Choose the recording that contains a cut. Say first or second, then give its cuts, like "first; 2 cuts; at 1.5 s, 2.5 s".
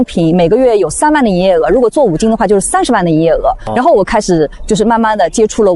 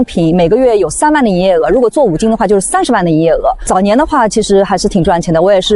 second; 1 cut; at 3.6 s